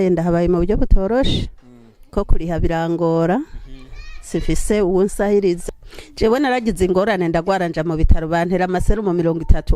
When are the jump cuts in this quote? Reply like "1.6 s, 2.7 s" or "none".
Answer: 5.6 s